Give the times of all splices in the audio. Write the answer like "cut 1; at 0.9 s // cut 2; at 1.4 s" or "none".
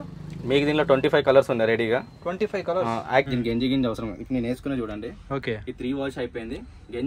cut 1; at 3.3 s